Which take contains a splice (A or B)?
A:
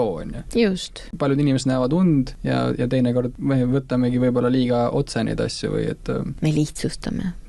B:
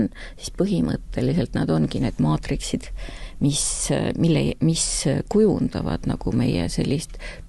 A